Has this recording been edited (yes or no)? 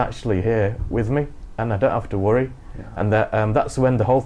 no